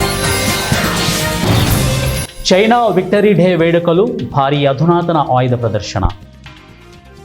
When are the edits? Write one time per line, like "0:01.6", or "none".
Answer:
0:02.0